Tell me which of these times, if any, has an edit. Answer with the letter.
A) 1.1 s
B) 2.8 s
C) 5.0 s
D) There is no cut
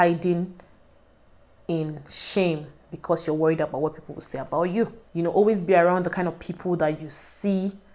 C